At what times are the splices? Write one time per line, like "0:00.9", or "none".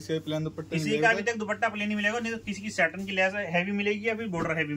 none